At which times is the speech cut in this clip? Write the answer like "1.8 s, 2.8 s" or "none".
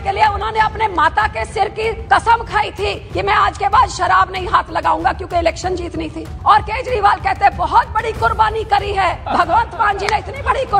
2.0 s, 3.1 s, 6.2 s, 9.2 s